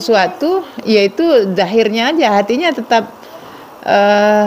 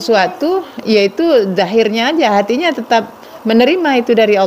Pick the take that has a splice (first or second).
second